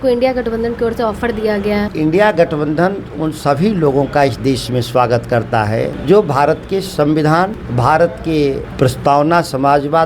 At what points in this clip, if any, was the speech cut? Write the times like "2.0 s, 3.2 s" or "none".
1.9 s, 6.0 s, 7.6 s, 8.7 s